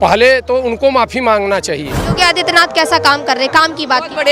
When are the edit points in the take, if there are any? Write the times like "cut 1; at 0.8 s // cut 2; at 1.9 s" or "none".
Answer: cut 1; at 2.0 s